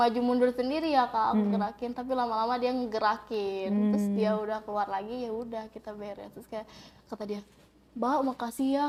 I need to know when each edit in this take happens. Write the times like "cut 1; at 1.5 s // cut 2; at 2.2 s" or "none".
none